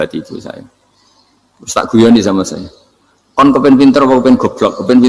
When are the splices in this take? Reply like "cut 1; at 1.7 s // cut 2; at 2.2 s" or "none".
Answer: none